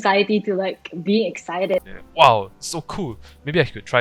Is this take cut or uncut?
cut